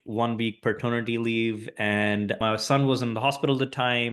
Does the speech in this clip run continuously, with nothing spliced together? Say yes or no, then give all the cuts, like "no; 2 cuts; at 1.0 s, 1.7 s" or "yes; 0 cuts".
no; 1 cut; at 2.4 s